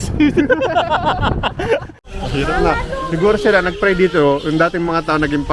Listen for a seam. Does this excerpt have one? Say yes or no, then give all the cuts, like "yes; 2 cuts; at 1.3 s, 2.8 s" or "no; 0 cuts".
yes; 1 cut; at 1.9 s